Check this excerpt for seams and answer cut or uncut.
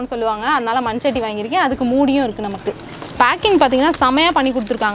uncut